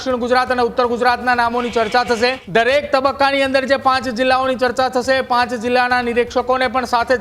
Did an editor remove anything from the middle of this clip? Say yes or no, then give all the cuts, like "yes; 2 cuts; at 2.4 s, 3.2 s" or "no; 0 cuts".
yes; 1 cut; at 2.4 s